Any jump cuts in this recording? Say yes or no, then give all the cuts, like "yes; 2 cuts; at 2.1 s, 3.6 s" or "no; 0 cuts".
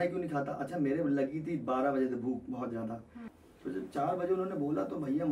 yes; 1 cut; at 3.3 s